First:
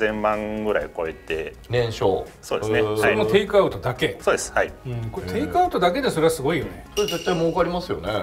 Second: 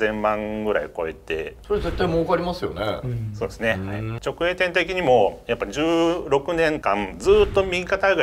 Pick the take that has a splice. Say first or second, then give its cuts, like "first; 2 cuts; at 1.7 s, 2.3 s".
second; 2 cuts; at 1.5 s, 4.1 s